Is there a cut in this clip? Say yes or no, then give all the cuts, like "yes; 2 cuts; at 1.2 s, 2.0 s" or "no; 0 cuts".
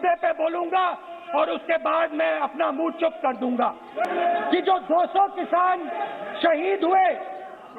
yes; 1 cut; at 4.1 s